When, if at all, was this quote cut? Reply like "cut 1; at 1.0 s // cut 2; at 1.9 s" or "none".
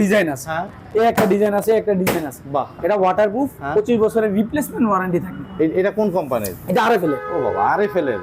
cut 1; at 2.9 s